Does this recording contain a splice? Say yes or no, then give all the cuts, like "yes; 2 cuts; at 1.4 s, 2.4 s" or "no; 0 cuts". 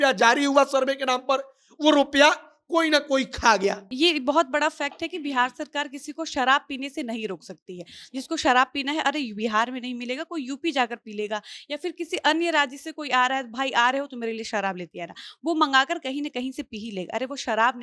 yes; 1 cut; at 3.8 s